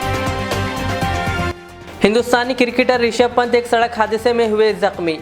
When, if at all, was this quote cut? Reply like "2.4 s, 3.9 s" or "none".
1.5 s